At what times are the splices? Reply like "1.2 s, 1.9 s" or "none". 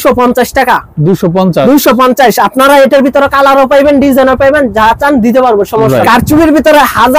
6.0 s